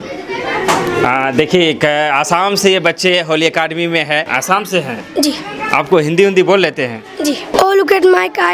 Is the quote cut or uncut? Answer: cut